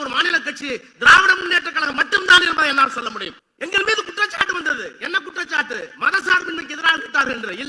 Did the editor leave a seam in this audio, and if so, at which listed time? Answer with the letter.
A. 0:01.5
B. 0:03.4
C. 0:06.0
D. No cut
B